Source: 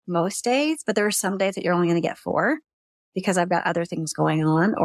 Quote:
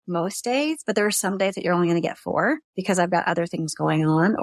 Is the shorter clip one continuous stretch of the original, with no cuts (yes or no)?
no